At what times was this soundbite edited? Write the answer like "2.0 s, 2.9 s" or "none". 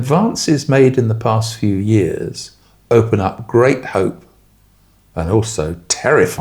none